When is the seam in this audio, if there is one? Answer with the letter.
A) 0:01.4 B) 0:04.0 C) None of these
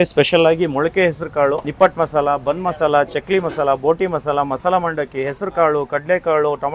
C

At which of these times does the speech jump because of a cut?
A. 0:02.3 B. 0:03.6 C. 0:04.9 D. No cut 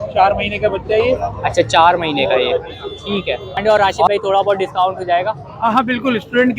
B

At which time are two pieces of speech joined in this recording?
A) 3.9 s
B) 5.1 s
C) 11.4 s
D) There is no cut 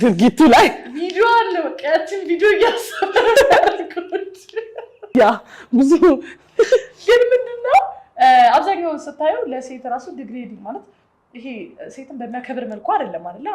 B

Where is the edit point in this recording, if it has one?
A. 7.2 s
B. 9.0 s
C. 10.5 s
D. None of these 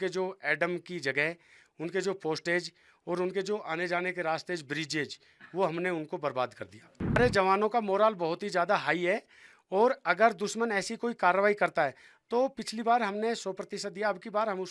A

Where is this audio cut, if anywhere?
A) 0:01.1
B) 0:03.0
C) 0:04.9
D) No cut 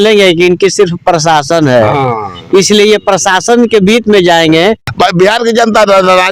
C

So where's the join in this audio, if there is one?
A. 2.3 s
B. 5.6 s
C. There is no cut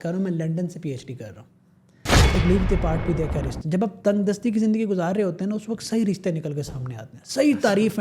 A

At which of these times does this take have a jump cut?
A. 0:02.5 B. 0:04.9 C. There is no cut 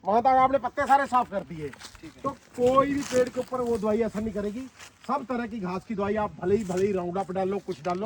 C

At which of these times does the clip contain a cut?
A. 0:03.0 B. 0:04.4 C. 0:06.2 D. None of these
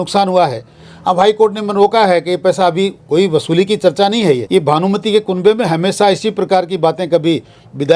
B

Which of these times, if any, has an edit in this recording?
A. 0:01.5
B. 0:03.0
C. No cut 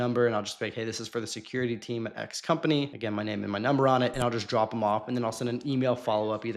B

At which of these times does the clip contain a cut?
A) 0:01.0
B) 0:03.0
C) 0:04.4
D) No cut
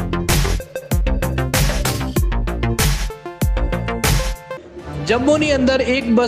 C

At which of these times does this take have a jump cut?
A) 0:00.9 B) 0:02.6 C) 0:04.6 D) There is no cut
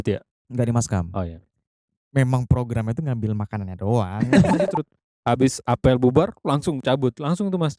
C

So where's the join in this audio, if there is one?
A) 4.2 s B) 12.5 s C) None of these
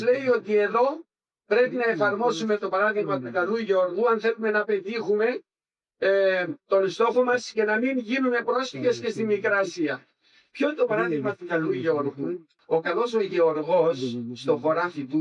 B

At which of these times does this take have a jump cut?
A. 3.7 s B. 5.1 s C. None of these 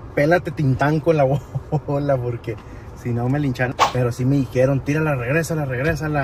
A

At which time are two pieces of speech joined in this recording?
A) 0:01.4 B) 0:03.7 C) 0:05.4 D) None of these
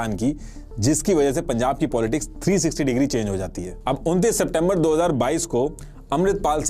B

